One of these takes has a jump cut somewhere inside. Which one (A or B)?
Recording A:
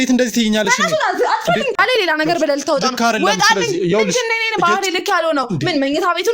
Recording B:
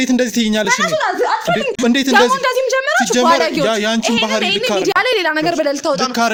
A